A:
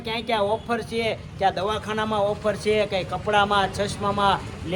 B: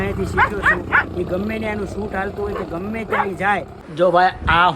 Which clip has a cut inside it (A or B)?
B